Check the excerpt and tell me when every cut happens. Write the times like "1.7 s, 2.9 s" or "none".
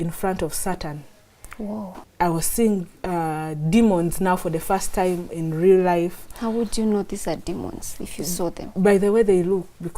1.9 s